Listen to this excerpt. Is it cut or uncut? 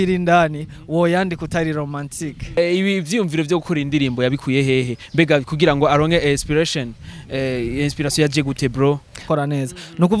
cut